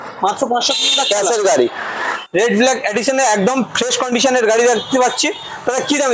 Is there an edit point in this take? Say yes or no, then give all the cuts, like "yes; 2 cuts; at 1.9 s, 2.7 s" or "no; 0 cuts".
yes; 1 cut; at 2.1 s